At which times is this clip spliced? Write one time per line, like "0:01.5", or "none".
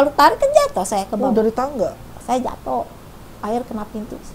0:02.1